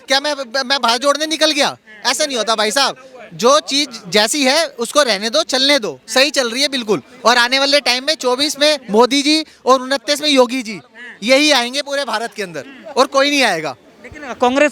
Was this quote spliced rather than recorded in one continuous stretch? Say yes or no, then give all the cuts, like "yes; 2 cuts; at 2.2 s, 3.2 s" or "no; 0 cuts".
no; 0 cuts